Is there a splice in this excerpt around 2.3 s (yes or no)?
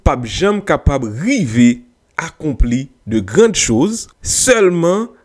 no